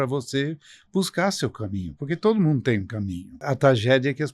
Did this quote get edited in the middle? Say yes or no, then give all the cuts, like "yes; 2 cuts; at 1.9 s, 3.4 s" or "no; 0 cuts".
yes; 1 cut; at 3.4 s